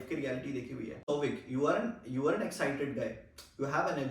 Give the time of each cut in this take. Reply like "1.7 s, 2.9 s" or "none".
1.0 s